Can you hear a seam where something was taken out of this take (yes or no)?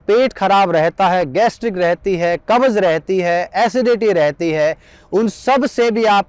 no